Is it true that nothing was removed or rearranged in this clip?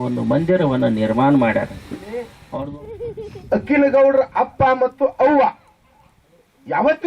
no; 1 cut; at 2.4 s

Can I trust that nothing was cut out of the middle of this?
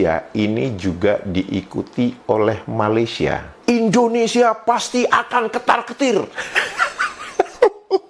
no; 1 cut; at 3.5 s

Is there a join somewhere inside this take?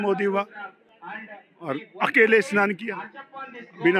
no; 0 cuts

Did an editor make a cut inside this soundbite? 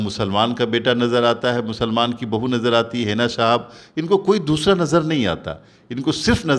no; 0 cuts

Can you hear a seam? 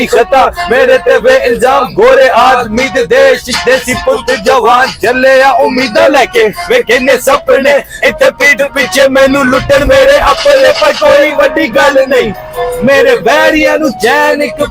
no; 0 cuts

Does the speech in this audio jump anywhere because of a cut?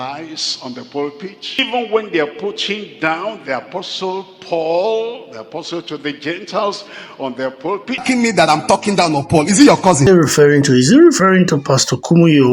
yes; 3 cuts; at 1.6 s, 8.0 s, 10.0 s

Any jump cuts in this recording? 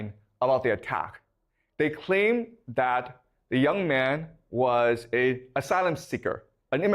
no; 0 cuts

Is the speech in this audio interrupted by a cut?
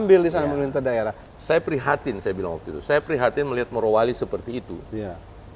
yes; 1 cut; at 1.2 s

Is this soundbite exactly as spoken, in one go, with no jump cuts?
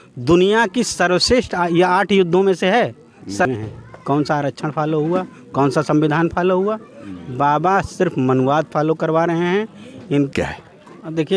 no; 2 cuts; at 3.5 s, 10.3 s

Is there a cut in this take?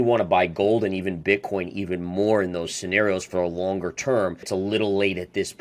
yes; 1 cut; at 4.5 s

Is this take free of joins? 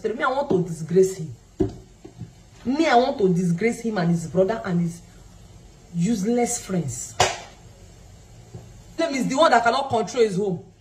no; 1 cut; at 8.9 s

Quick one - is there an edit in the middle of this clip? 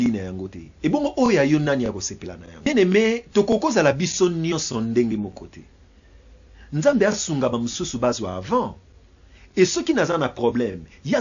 yes; 1 cut; at 2.7 s

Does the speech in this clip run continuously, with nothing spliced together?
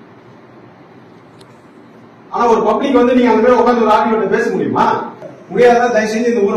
no; 1 cut; at 5.2 s

